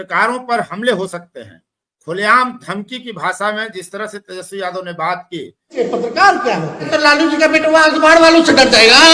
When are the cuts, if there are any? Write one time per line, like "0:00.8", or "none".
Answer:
0:05.7
0:06.9